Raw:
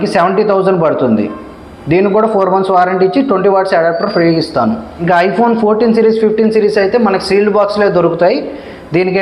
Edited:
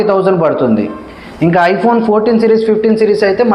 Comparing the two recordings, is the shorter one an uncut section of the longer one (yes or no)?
no